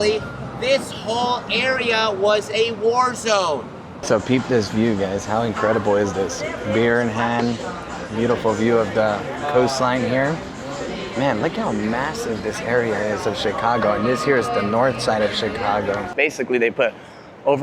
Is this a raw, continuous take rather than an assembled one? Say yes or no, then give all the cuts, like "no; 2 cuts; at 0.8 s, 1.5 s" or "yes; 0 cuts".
no; 2 cuts; at 3.9 s, 16.1 s